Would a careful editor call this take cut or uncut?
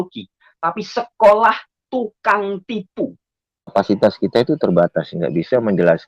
cut